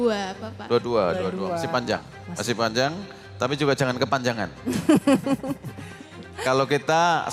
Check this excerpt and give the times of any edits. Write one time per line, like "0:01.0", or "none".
none